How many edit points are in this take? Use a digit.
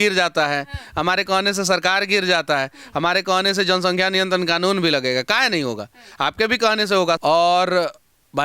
1